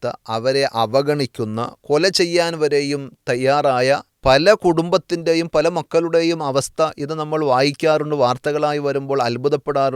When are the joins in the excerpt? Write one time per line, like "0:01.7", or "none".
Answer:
0:04.1